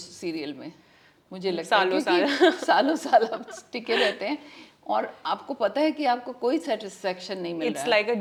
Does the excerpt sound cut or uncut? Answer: uncut